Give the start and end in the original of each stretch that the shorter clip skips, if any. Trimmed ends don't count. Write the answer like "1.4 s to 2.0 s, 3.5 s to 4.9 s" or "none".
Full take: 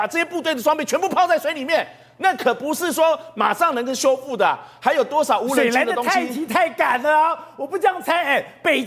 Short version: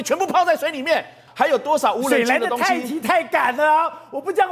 2.0 s to 4.7 s